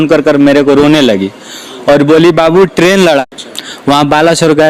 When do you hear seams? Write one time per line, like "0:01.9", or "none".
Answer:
0:03.2